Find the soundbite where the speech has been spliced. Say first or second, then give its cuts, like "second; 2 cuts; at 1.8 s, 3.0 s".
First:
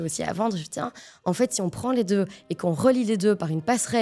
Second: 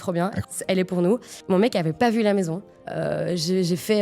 second; 2 cuts; at 1.3 s, 2.7 s